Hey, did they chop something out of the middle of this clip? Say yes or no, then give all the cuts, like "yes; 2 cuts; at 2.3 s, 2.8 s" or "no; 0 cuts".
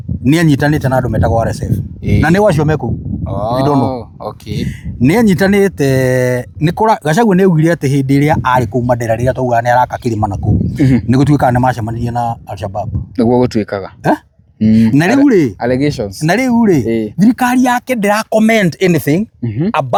no; 0 cuts